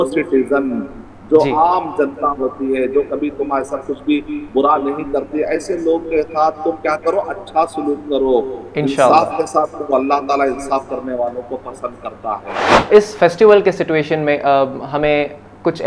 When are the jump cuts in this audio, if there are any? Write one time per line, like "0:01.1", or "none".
0:12.9